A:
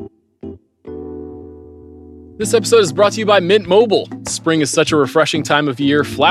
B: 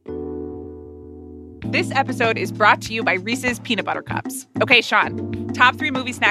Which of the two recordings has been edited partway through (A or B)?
A